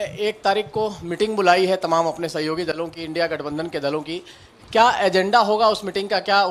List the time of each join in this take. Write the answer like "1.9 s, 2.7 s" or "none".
none